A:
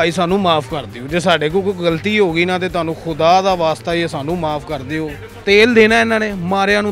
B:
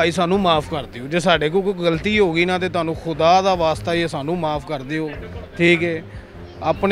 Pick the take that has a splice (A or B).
A